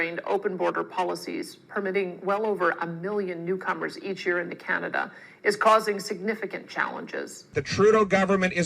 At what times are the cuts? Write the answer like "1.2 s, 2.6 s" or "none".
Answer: 7.4 s

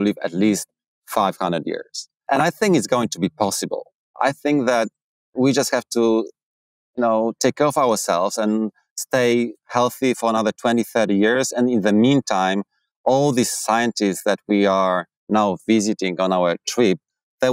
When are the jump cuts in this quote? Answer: 2.2 s, 4.0 s

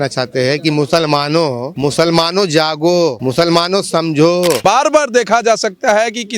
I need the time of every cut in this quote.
1.7 s, 3.2 s, 4.6 s

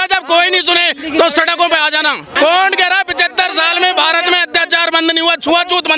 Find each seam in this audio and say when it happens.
2.3 s

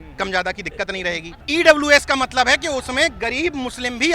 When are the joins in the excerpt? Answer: 1.3 s

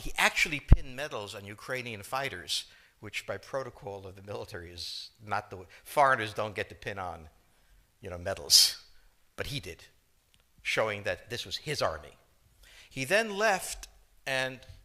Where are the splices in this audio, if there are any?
7.4 s

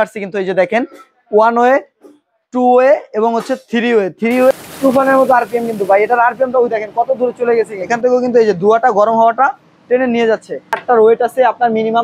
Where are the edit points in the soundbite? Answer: 4.5 s, 7.8 s, 10.8 s

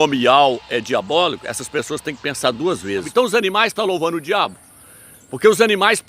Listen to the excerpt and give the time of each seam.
3.1 s

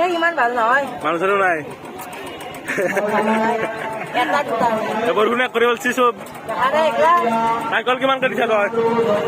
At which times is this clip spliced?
none

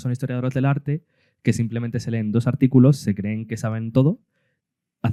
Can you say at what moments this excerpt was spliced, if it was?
none

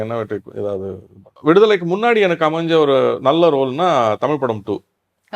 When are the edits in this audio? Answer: 1.2 s

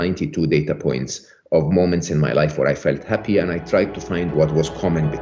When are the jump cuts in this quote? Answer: 4.3 s

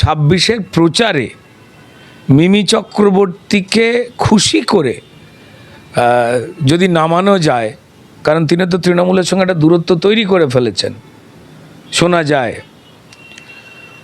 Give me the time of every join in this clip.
none

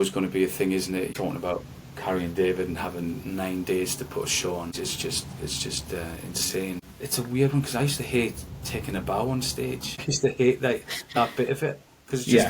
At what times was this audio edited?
1.1 s, 4.7 s, 6.9 s, 10.0 s

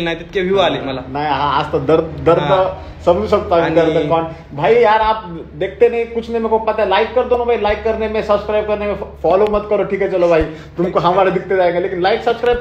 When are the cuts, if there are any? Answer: none

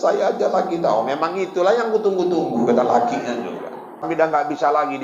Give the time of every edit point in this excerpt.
4.1 s

